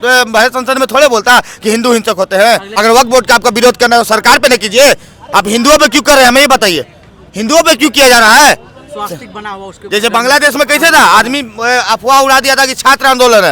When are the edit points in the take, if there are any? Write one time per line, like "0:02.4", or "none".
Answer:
0:02.7

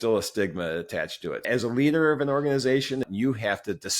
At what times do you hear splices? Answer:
0:01.4
0:03.1

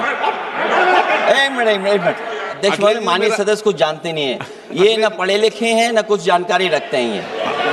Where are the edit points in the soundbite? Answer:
0:02.5

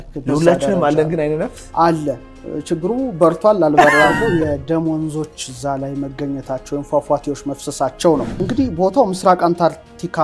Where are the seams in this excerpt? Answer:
0:04.2
0:08.4

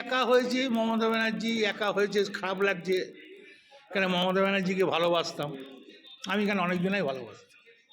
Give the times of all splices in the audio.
none

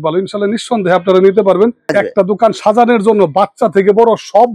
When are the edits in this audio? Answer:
0:01.8

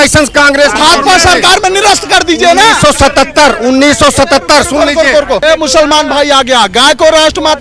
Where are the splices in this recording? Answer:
0:05.4

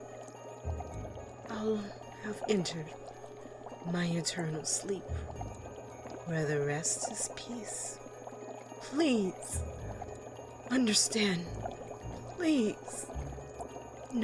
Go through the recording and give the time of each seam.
none

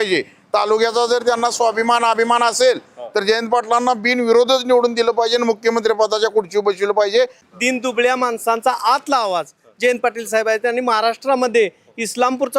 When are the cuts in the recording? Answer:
0:07.4

